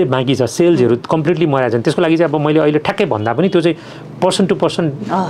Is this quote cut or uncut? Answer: uncut